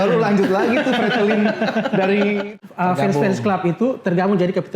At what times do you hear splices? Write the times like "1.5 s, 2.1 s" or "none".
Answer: 2.5 s